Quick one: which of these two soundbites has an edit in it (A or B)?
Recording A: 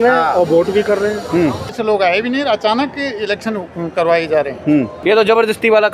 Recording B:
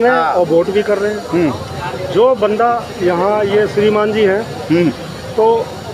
A